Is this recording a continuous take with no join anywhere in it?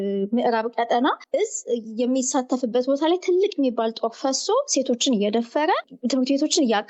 no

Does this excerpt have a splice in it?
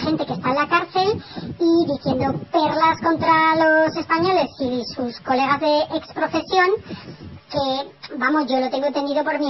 yes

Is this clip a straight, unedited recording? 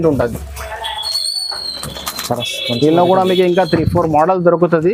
yes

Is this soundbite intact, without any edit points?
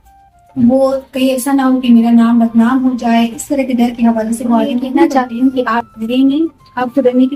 no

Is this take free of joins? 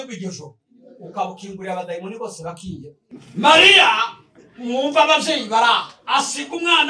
no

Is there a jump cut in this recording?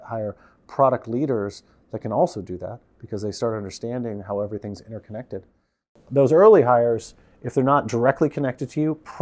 yes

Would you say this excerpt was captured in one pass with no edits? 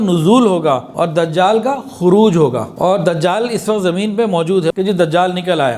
no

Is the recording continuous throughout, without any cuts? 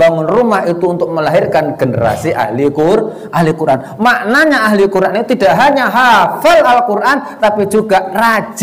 yes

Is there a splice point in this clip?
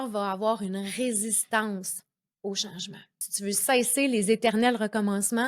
yes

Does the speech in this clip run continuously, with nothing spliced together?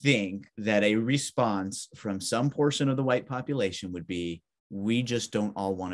yes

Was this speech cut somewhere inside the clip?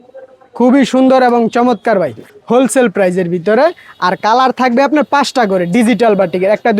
yes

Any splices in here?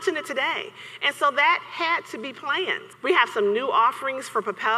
yes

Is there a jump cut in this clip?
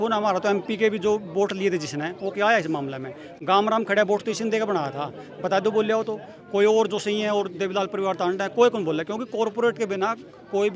no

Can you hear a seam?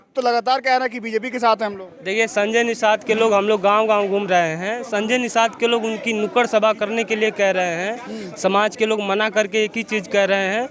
no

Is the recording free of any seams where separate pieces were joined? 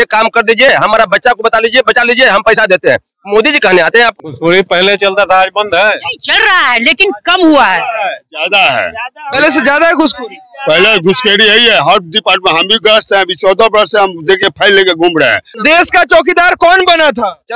no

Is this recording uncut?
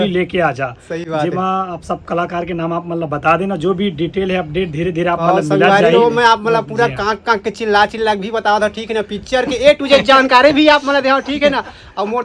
yes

